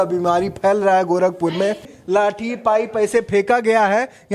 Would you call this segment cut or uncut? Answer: cut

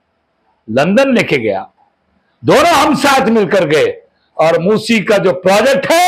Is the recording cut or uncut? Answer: uncut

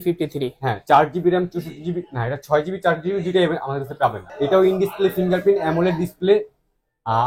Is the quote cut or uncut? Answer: cut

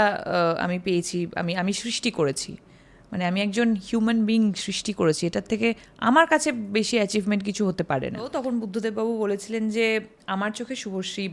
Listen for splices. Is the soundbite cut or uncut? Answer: cut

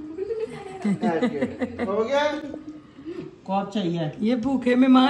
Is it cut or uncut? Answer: uncut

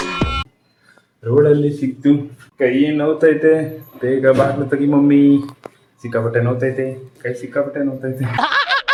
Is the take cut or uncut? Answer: uncut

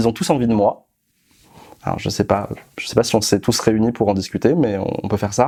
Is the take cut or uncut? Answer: uncut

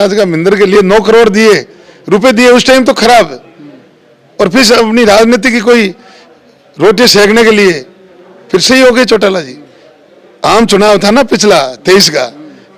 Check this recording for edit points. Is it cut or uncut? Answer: uncut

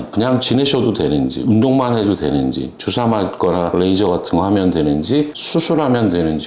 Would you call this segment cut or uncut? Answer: uncut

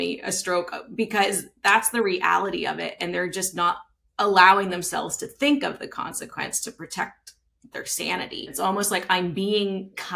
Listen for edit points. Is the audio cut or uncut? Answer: cut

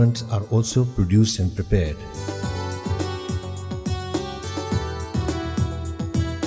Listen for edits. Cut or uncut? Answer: cut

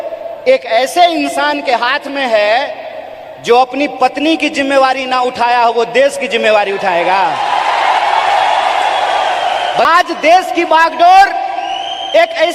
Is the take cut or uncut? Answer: cut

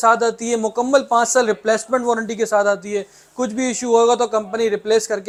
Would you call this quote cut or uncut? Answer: uncut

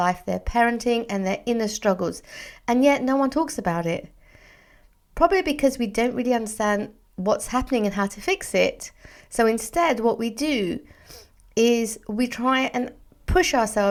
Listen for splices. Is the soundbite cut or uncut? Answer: uncut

